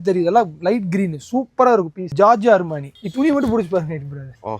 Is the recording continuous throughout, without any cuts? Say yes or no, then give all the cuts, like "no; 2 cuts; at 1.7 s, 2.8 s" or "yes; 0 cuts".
no; 1 cut; at 2.1 s